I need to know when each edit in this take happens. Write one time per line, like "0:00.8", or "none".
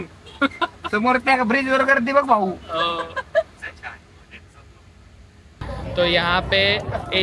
0:05.6

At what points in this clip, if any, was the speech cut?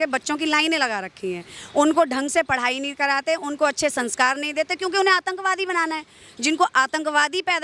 none

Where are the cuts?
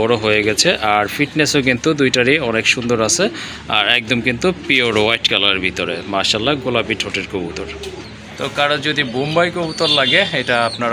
none

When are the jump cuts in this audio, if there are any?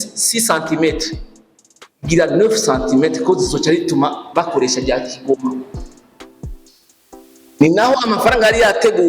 0:05.7
0:07.2

